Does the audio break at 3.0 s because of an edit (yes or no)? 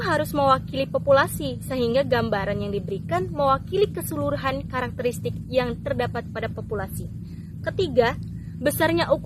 no